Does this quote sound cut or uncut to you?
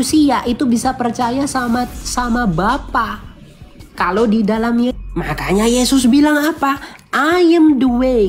cut